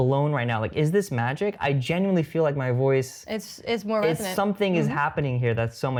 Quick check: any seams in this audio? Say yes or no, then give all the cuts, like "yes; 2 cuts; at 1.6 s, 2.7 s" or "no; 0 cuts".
no; 0 cuts